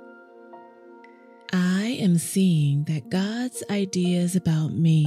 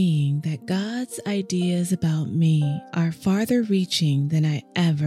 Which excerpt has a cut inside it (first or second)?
first